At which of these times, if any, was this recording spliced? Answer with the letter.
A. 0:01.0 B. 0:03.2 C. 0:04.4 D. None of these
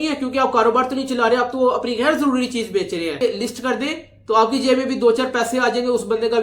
B